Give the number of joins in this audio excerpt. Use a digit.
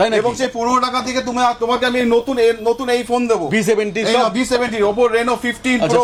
0